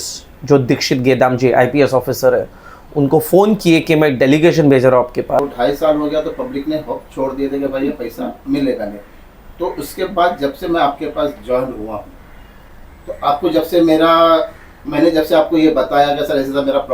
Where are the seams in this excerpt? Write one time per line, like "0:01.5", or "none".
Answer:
0:05.4